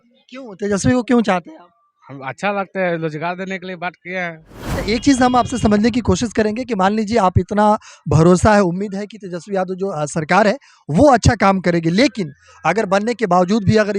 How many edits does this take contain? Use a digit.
1